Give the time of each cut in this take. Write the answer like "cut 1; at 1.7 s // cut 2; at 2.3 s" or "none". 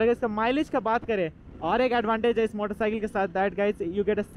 cut 1; at 1.5 s